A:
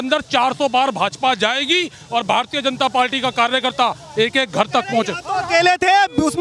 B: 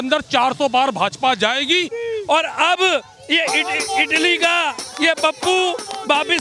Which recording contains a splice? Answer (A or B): B